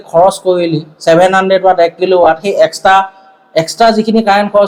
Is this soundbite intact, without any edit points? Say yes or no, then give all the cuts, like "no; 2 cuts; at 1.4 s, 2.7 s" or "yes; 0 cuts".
yes; 0 cuts